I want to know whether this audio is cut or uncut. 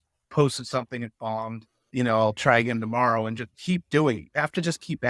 cut